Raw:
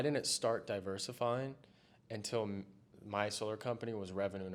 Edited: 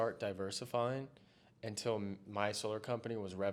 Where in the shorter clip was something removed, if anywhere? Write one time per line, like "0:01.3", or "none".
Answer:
0:02.2